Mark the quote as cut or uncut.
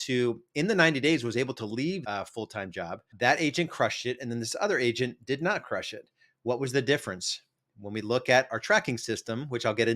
cut